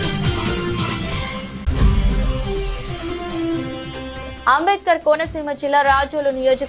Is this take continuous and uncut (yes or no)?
no